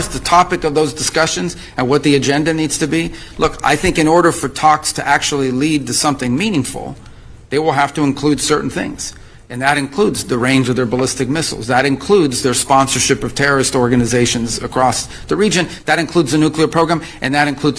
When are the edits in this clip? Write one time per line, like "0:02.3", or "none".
none